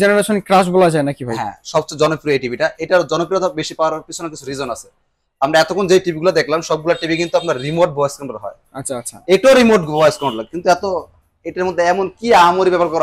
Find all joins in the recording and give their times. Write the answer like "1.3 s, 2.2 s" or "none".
none